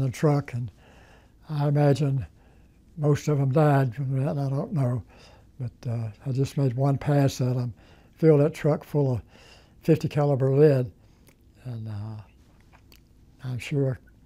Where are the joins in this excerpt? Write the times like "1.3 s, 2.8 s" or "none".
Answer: none